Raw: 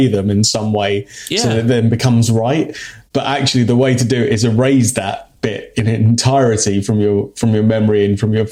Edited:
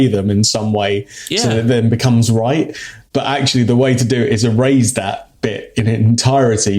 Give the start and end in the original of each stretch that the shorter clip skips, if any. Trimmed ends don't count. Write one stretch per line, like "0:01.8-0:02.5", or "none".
none

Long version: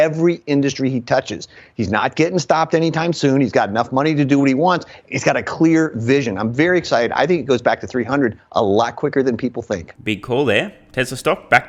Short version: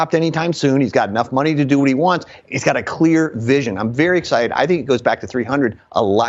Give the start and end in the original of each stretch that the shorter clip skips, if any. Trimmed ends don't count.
none

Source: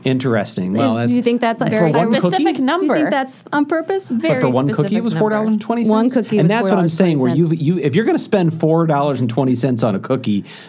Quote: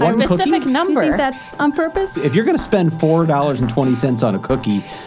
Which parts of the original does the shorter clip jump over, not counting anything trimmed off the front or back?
0:04.1-0:07.8

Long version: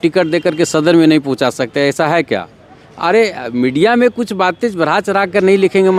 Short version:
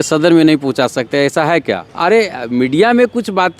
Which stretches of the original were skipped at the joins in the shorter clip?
0:02.5-0:02.9

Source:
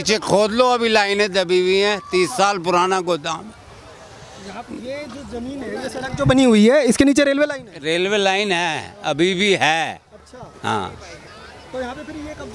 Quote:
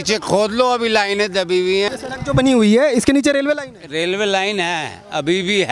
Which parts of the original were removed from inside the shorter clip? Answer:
0:01.9-0:05.8

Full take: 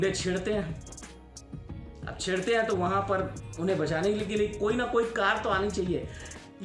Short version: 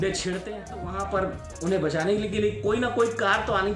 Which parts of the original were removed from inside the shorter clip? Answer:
0:01.0-0:03.0

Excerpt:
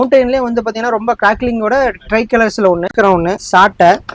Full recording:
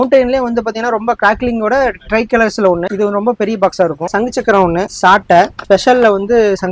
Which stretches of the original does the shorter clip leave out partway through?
0:02.9-0:04.4

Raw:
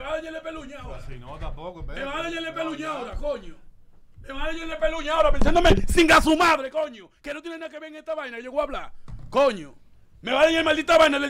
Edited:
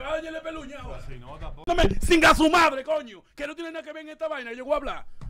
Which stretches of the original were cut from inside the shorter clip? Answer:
0:01.7-0:05.5

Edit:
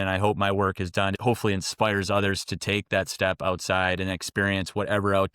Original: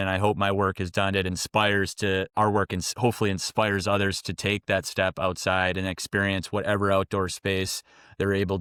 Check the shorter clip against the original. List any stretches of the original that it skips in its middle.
0:01.1-0:02.9

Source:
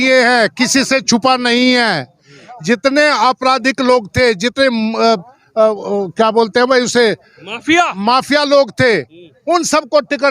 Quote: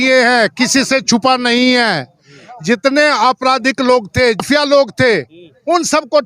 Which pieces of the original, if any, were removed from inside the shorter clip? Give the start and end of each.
0:04.4-0:08.2

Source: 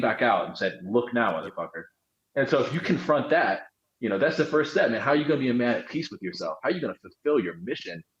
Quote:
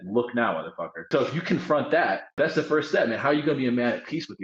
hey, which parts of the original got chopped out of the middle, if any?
0:01.9-0:02.5
0:03.7-0:04.2

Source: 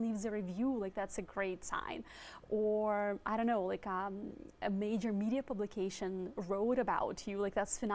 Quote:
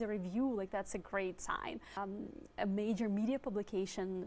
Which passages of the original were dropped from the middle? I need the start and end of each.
0:02.3-0:04.1

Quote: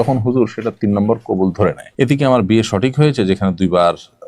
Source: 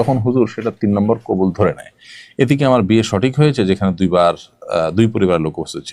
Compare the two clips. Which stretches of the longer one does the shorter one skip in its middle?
0:01.8-0:02.2

